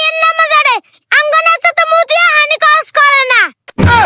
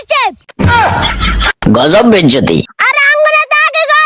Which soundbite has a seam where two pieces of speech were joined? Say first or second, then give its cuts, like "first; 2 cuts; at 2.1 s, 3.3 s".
second; 1 cut; at 2.7 s